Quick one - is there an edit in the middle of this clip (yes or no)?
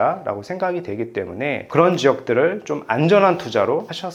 no